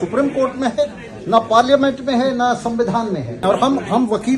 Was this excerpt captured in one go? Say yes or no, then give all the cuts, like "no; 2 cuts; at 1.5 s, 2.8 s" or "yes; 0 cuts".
no; 1 cut; at 3.4 s